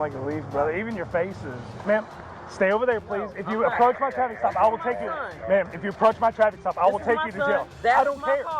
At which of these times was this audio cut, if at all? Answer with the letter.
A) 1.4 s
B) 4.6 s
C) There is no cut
A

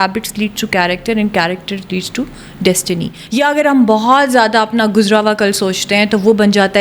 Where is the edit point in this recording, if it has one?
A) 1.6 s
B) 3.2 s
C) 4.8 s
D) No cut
B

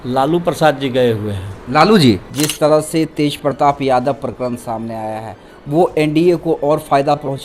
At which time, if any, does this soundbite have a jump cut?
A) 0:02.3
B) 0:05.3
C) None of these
A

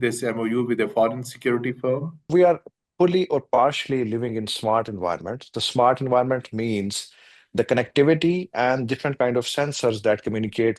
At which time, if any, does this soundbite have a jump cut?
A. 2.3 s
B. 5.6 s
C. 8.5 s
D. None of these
A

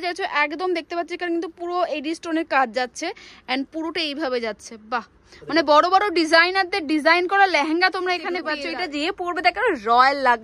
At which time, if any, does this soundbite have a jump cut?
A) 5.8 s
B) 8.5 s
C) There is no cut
B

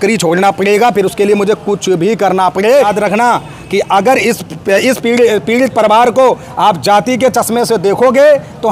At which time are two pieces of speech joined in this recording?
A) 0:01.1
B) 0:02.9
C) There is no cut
B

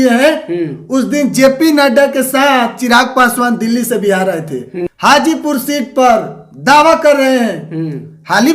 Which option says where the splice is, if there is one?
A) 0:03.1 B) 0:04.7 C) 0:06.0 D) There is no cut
B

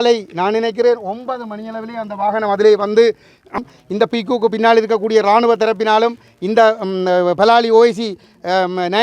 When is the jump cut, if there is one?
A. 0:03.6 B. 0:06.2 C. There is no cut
A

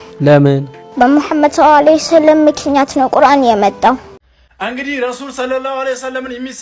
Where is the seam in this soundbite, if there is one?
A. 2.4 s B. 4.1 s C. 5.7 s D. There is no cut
B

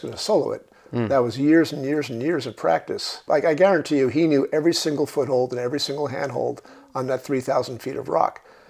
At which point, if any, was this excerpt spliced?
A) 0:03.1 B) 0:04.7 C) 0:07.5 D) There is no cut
A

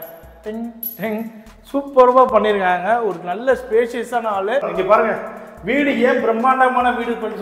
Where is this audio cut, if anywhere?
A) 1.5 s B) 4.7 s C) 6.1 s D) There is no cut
B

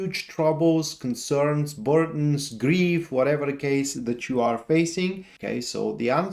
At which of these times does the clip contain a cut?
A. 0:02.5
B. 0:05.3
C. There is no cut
B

